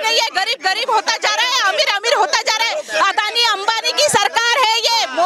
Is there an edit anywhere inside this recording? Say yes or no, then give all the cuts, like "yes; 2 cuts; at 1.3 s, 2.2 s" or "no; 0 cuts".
no; 0 cuts